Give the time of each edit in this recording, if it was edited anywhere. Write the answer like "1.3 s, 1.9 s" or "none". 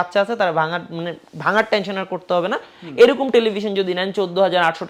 none